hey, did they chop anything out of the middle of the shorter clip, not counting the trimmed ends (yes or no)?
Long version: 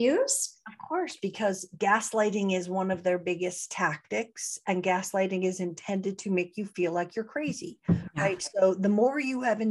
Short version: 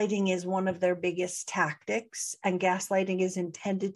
no